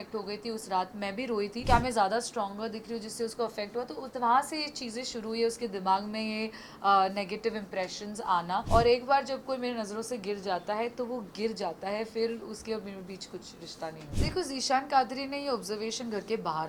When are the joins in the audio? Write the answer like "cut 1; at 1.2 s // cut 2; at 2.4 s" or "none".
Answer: cut 1; at 1.6 s // cut 2; at 8.7 s // cut 3; at 14.1 s

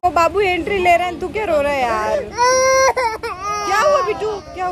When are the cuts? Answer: none

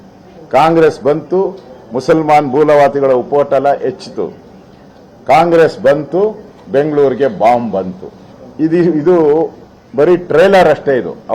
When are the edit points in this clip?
none

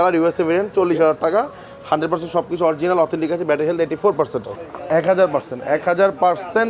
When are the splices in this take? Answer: cut 1; at 4.5 s

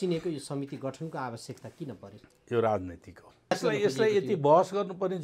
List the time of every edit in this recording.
cut 1; at 3.5 s

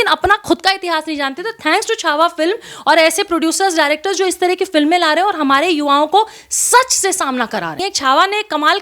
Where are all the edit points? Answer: cut 1; at 7.8 s

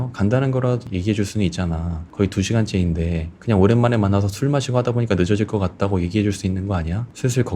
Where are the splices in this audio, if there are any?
none

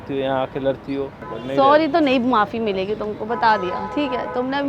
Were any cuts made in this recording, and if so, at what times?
cut 1; at 1.2 s

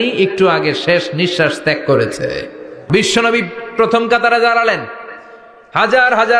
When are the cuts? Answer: cut 1; at 2.9 s

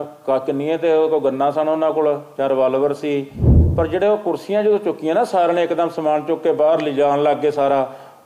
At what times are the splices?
cut 1; at 3.6 s

